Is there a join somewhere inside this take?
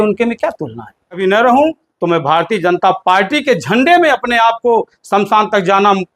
yes; 1 cut; at 1.2 s

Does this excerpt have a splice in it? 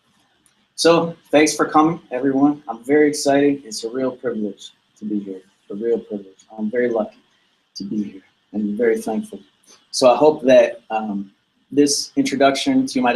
no; 0 cuts

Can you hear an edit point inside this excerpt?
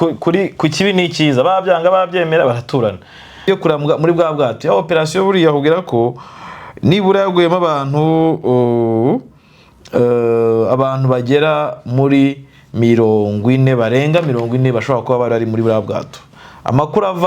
yes; 1 cut; at 3.3 s

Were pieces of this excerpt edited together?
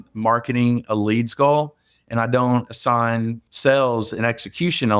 no; 0 cuts

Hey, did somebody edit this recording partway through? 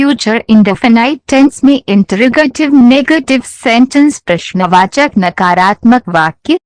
no; 0 cuts

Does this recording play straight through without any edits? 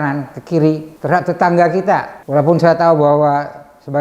no; 2 cuts; at 0.9 s, 2.2 s

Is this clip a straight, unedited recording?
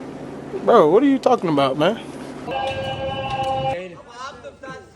no; 2 cuts; at 2.5 s, 3.7 s

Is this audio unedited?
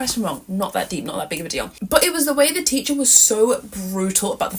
no; 1 cut; at 1.8 s

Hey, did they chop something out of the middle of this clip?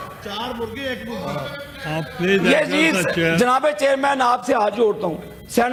no; 0 cuts

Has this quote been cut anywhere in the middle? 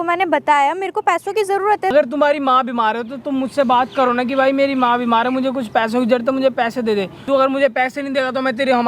yes; 2 cuts; at 1.9 s, 7.2 s

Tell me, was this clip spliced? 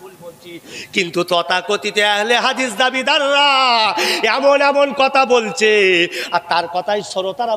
no; 0 cuts

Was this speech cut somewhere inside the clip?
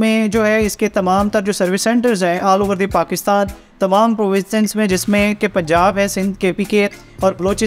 no; 0 cuts

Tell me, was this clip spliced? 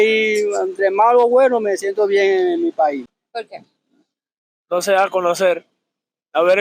no; 0 cuts

